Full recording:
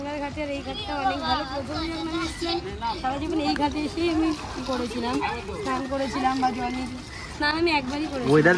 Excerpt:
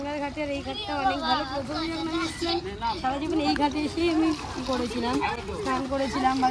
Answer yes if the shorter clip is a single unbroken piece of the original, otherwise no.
yes